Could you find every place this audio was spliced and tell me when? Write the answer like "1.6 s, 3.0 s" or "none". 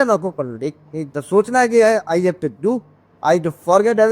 none